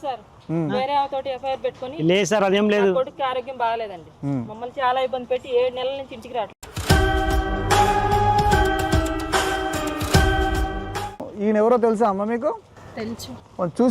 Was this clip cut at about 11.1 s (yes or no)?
yes